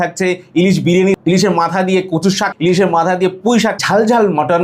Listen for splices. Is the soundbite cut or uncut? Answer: cut